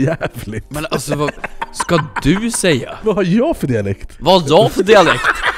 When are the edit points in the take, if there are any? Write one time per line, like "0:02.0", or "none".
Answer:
0:02.9
0:04.1